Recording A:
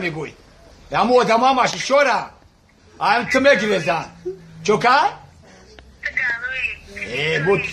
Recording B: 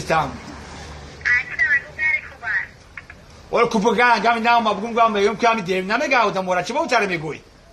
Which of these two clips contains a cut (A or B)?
B